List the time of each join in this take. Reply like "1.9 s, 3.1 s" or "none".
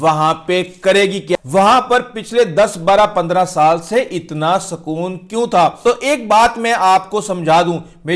1.4 s, 5.8 s